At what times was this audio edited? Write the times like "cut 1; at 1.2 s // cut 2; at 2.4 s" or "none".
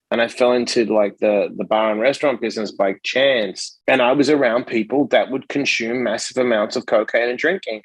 cut 1; at 3.6 s